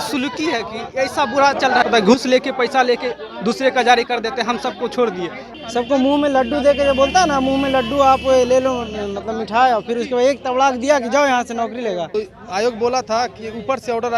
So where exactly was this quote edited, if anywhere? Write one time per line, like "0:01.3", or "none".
0:01.8
0:05.4
0:12.1